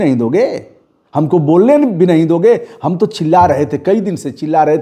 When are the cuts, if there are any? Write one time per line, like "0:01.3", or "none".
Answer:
none